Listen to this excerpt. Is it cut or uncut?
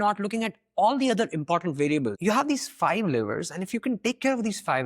cut